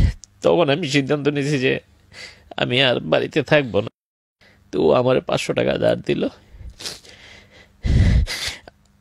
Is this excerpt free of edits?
no; 1 cut; at 4.0 s

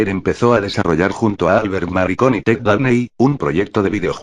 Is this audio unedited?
no; 1 cut; at 2.5 s

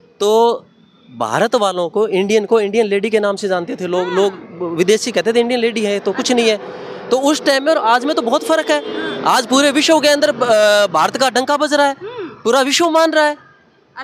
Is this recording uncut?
yes; 0 cuts

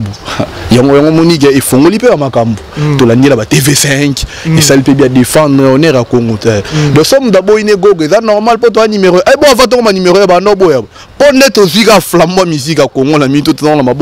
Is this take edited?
no; 0 cuts

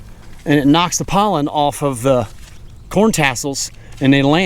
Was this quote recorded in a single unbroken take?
yes; 0 cuts

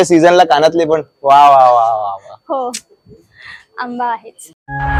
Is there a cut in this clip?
no; 0 cuts

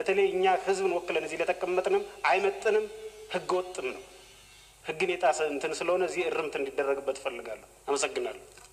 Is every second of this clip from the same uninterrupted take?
yes; 0 cuts

